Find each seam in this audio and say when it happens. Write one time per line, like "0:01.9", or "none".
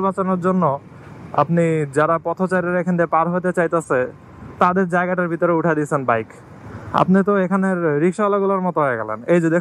none